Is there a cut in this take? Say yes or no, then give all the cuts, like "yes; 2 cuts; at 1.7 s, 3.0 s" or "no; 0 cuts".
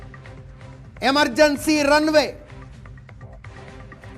yes; 1 cut; at 1.0 s